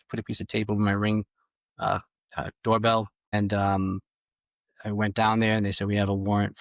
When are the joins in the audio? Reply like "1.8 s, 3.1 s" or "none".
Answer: 3.3 s